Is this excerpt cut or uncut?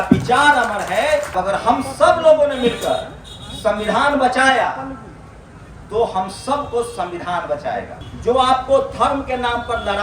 cut